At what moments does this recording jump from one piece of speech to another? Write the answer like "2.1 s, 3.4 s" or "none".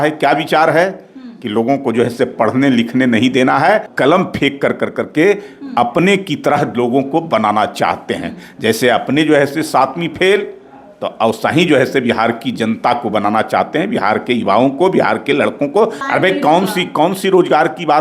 3.9 s, 16.0 s